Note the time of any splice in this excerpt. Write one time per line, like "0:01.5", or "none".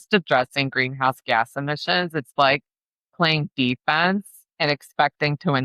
none